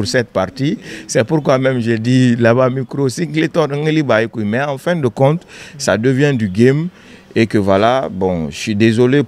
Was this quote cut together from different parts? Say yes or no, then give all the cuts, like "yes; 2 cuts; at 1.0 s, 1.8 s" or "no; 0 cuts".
no; 0 cuts